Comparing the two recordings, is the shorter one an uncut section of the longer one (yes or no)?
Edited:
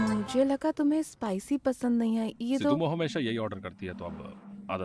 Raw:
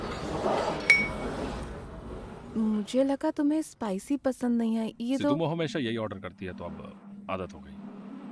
yes